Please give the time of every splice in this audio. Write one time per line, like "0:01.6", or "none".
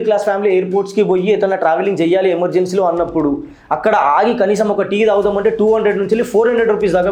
none